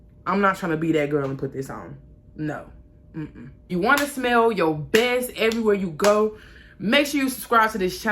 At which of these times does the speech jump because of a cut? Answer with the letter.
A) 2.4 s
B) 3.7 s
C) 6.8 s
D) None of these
B